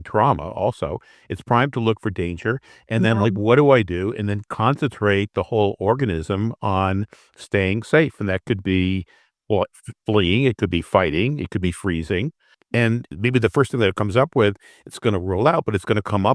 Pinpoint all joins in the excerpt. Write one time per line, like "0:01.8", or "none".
0:12.8